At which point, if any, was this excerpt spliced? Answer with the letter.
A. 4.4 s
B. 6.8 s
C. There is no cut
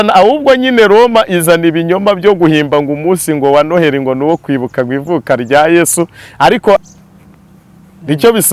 B